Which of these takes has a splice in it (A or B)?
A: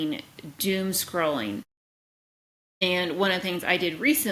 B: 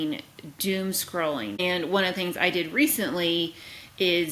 B